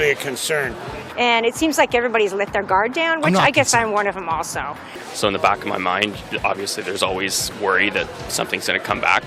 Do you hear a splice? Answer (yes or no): yes